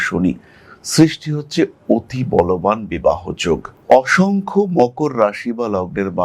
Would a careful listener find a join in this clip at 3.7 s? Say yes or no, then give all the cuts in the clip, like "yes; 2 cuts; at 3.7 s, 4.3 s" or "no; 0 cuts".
yes; 1 cut; at 3.7 s